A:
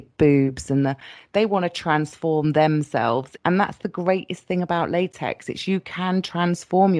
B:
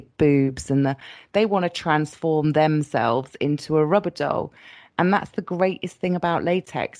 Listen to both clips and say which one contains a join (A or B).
A